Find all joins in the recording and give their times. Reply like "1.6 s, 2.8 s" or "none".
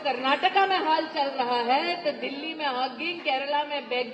none